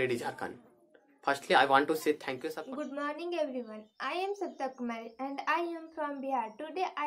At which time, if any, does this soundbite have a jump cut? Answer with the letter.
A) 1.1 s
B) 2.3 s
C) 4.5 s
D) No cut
B